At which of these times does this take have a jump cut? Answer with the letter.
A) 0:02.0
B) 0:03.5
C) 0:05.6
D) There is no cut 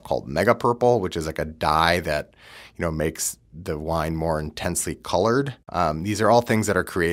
C